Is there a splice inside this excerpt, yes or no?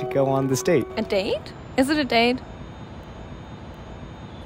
no